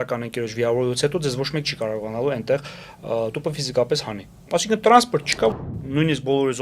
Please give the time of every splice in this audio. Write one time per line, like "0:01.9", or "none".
0:05.5